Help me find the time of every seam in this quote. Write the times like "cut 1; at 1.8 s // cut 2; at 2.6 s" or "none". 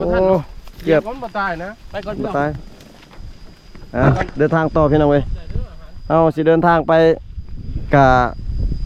none